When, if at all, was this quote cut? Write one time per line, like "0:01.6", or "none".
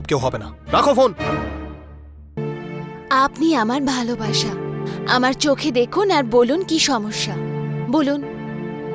0:02.4